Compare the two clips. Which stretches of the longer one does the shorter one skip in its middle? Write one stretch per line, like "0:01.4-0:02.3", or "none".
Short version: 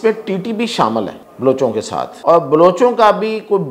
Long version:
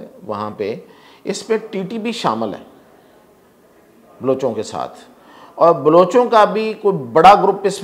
0:02.7-0:04.1
0:05.0-0:05.5